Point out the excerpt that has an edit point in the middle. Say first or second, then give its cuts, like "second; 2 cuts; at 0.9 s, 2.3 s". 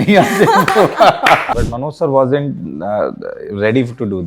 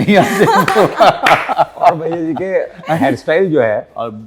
first; 1 cut; at 1.5 s